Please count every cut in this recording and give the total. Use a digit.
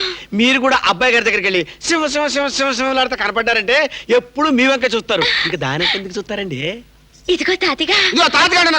0